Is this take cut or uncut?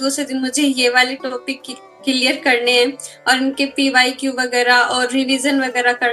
uncut